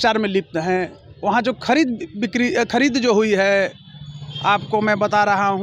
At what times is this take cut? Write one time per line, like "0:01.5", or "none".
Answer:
none